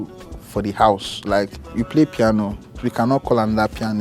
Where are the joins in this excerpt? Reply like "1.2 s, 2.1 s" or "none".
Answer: 1.7 s, 2.8 s